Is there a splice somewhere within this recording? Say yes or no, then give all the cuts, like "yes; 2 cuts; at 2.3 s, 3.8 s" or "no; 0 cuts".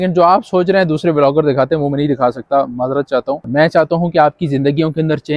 no; 0 cuts